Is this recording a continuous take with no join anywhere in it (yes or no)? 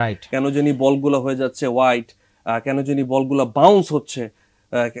yes